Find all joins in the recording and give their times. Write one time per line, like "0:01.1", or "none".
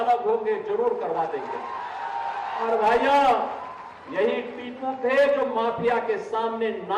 0:02.6